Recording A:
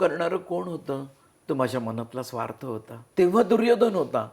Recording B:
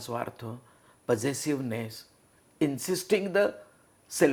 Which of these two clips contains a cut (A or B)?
A